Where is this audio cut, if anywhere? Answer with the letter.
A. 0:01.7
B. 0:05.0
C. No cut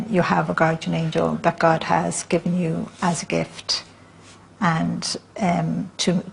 A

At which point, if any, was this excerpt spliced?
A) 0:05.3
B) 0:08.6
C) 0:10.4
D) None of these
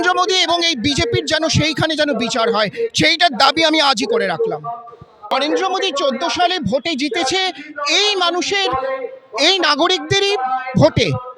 A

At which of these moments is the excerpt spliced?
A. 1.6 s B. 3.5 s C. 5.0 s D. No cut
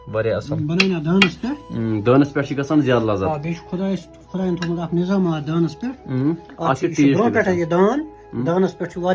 D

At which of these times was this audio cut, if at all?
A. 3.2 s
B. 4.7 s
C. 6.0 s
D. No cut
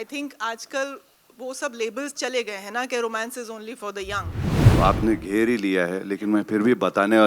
B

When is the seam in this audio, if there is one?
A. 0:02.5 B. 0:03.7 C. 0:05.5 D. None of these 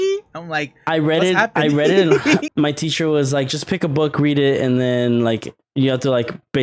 A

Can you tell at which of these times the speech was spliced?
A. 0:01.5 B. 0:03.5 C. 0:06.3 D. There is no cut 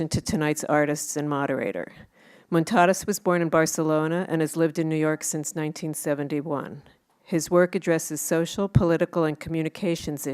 B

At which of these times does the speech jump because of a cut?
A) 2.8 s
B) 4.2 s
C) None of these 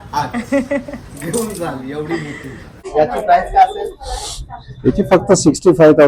A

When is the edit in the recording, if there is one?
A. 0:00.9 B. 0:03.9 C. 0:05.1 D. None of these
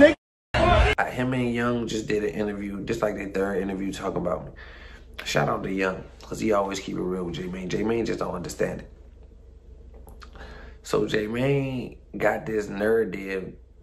A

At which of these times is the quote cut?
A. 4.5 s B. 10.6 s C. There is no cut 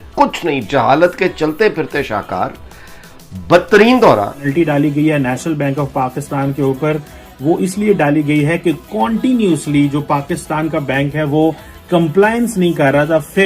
A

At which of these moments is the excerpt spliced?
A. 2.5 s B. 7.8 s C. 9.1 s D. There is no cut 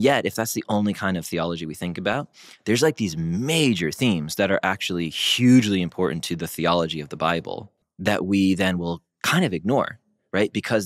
B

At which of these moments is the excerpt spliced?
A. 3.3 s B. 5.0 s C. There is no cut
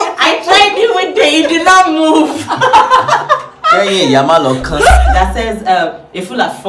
B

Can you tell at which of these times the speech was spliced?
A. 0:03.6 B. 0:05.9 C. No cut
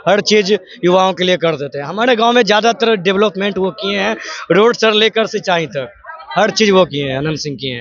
C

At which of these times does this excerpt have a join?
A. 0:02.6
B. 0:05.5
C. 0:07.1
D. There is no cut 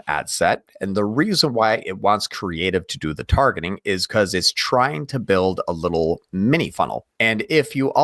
C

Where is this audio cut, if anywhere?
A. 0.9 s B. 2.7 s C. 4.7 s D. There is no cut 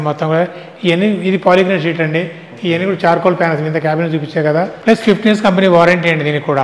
C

